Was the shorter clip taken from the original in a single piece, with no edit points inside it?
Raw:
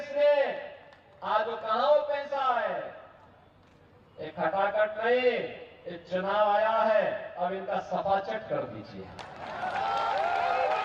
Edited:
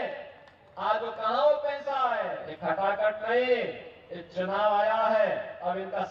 no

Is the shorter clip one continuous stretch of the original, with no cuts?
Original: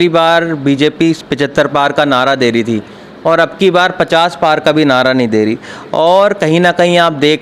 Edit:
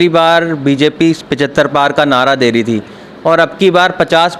yes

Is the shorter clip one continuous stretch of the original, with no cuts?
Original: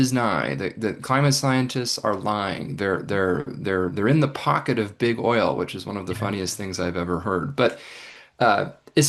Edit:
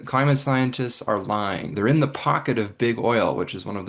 no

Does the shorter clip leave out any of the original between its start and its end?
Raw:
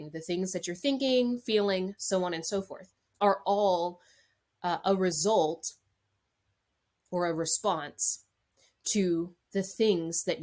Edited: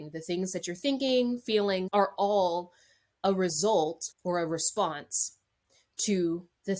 yes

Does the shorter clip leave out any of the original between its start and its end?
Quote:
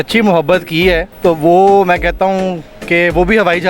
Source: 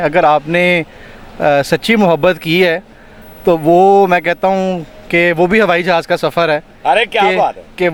yes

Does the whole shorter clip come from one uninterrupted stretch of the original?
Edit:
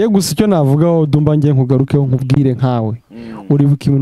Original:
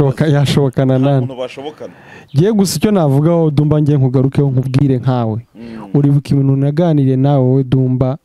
yes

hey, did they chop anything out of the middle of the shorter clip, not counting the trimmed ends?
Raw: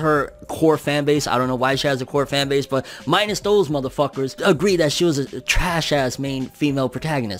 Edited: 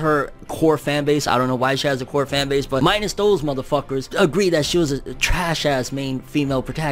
yes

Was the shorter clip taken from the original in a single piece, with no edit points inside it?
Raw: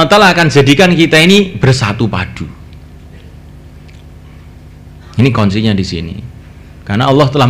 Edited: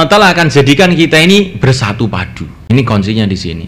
no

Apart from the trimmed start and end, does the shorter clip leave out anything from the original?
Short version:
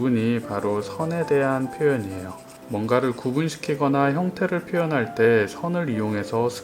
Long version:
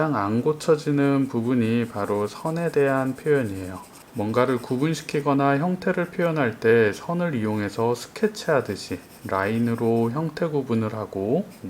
no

